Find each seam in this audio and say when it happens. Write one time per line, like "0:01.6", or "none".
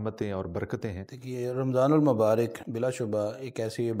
0:01.1
0:02.6